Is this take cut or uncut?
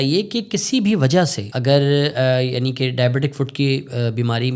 cut